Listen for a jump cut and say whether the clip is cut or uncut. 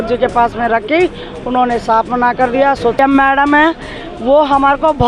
cut